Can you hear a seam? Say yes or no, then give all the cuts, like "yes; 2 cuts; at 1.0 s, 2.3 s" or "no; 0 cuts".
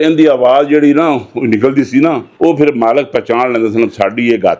yes; 1 cut; at 2.3 s